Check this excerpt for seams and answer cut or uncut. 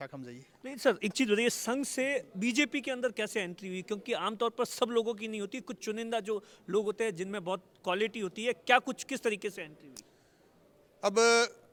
uncut